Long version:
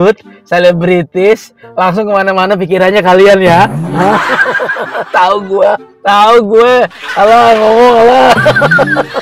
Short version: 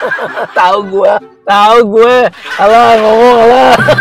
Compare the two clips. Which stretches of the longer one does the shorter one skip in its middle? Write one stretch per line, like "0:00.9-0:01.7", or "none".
none